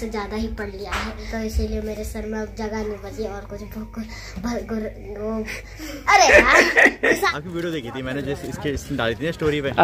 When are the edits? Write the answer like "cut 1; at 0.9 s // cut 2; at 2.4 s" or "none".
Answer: cut 1; at 1.1 s // cut 2; at 7.3 s